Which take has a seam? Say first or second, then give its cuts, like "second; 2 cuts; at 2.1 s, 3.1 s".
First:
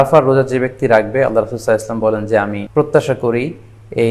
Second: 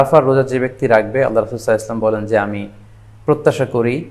first; 1 cut; at 2.6 s